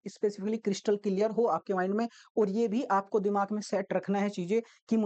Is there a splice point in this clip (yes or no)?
no